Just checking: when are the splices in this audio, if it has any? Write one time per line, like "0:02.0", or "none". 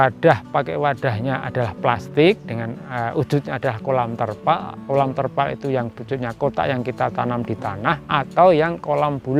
none